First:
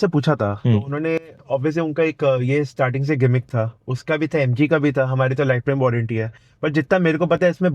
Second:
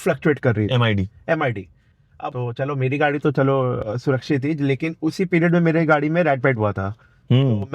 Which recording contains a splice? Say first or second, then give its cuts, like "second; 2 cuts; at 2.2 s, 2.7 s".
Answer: second; 1 cut; at 2.2 s